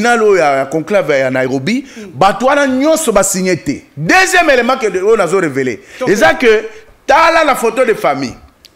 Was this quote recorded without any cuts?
yes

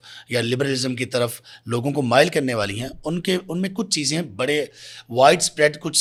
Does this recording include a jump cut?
no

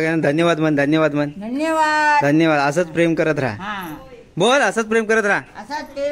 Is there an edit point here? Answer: no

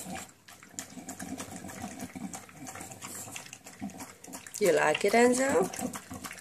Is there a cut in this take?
no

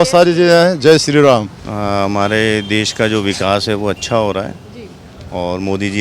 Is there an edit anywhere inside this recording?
yes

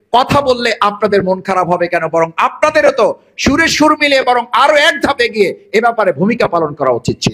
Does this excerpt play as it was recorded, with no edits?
yes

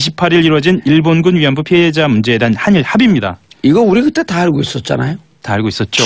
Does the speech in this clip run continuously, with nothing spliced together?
yes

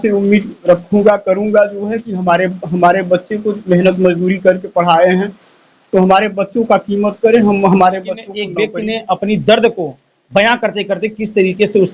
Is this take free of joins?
no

